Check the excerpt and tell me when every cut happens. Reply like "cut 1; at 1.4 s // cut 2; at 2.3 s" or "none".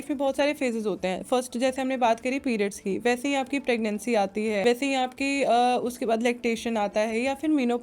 cut 1; at 4.6 s